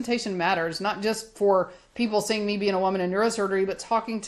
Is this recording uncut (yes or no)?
yes